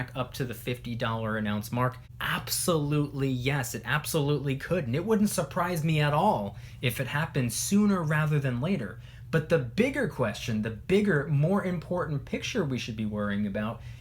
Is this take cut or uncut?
cut